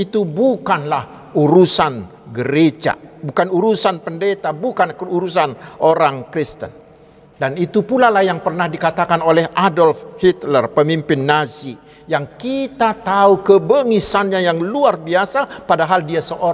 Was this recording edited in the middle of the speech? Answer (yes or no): no